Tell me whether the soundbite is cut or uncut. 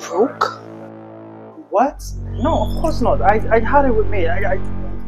cut